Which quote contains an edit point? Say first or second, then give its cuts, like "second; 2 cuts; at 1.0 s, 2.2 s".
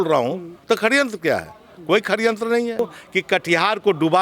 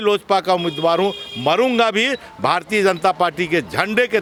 first; 1 cut; at 3.0 s